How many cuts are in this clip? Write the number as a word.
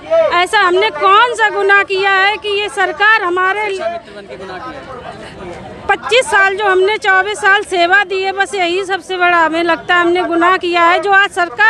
zero